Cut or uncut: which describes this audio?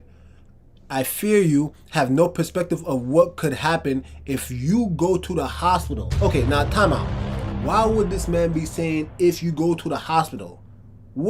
uncut